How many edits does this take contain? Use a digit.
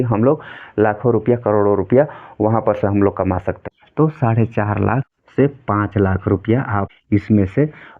3